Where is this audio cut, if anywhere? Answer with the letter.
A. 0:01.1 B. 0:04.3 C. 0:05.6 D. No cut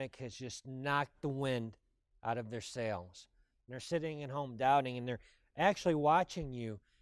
D